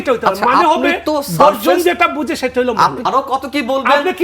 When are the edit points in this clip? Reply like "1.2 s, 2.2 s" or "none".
3.0 s

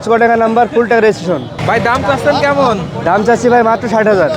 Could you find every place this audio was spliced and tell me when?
1.5 s

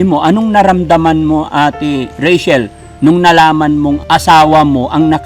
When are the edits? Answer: 4.0 s

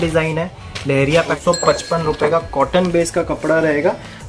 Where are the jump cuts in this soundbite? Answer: 1.4 s

